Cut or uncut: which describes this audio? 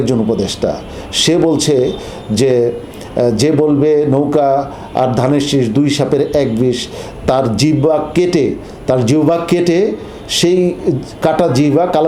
uncut